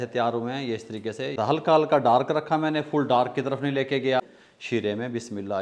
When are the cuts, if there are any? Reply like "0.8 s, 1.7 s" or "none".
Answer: 1.4 s, 4.2 s